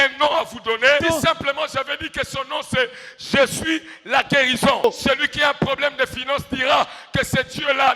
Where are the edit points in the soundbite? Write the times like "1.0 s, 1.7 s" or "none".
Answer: 1.0 s, 4.8 s

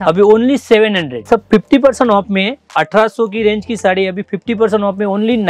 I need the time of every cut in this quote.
1.3 s, 2.7 s

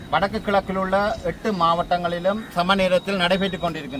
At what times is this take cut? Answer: none

